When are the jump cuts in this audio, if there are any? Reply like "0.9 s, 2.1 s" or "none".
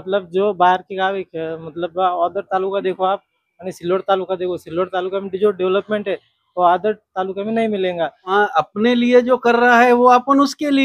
8.3 s